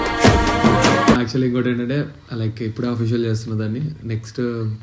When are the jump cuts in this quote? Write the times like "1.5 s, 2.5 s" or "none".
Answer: 1.2 s